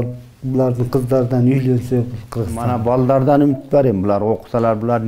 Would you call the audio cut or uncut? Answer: cut